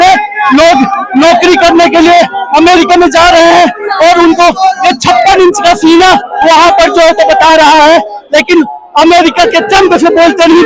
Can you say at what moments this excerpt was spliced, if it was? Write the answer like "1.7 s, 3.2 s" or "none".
none